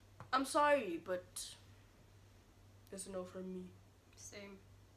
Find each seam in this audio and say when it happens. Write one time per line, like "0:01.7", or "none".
none